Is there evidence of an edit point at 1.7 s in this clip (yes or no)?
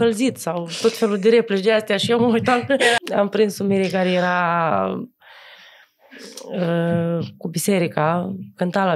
no